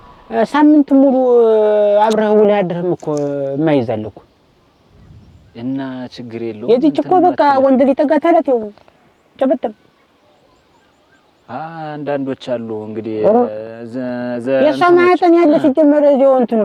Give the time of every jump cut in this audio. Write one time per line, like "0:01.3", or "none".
none